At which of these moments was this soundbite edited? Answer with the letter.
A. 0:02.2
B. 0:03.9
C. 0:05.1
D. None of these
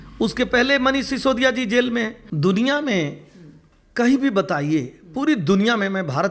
A